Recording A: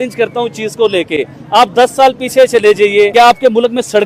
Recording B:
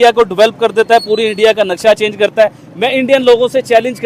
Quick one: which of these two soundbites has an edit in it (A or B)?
A